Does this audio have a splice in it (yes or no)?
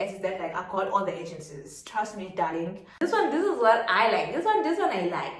yes